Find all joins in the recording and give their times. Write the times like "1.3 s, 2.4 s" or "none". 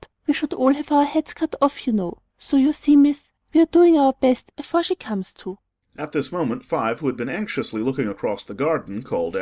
8.0 s

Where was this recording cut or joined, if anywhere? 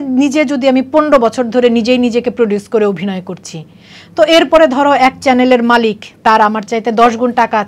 none

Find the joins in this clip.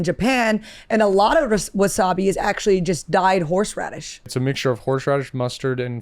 4.3 s

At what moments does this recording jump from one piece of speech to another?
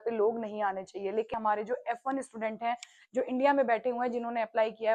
1.3 s

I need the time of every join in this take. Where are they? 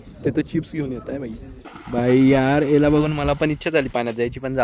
1.5 s

